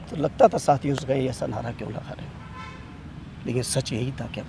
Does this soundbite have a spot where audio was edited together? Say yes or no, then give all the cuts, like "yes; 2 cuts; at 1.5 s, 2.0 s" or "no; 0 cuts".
no; 0 cuts